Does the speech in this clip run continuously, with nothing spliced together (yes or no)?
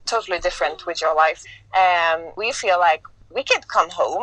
no